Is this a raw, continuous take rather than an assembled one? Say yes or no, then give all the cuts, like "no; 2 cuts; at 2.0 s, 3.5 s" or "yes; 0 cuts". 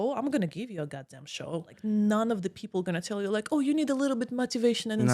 no; 1 cut; at 1.7 s